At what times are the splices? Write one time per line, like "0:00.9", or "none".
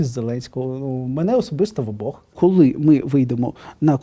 0:02.3